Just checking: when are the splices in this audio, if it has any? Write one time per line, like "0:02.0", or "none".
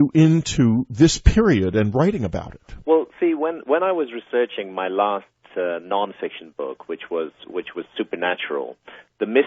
0:02.0